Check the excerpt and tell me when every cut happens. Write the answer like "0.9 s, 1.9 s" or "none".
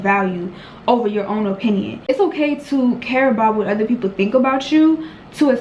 2.0 s